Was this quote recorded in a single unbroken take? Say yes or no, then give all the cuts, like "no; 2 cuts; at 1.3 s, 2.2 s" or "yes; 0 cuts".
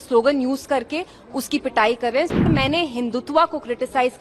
no; 1 cut; at 2.5 s